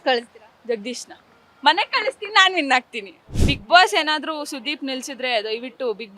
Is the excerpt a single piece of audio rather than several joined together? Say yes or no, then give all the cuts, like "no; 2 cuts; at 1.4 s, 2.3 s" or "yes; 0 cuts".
no; 1 cut; at 3.5 s